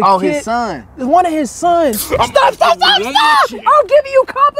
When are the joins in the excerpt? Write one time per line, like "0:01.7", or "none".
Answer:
0:03.6